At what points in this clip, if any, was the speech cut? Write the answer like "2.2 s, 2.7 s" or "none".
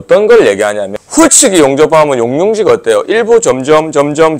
1.0 s